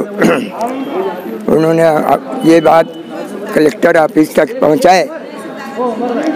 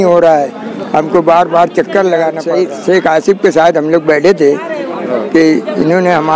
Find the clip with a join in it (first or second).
second